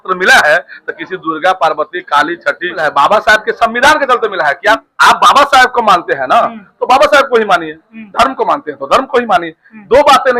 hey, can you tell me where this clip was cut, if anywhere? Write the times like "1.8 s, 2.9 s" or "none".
2.8 s, 4.9 s